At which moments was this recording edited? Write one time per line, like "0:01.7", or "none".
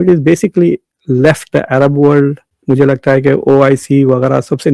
0:00.9
0:02.5